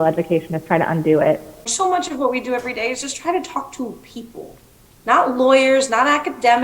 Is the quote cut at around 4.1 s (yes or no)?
no